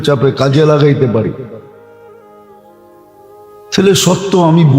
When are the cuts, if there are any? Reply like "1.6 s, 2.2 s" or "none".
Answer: 1.6 s, 3.1 s